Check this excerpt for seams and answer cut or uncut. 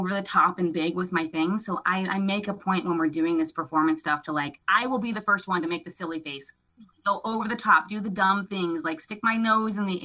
cut